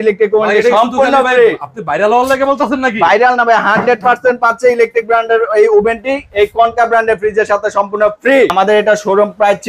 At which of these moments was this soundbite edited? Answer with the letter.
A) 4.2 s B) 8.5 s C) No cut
B